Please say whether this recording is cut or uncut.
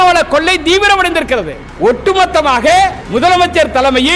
cut